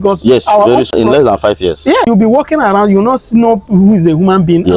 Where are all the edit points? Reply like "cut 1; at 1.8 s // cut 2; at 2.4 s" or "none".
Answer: cut 1; at 0.9 s // cut 2; at 2.1 s